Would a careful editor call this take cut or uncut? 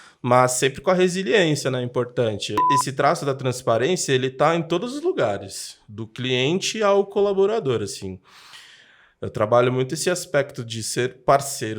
cut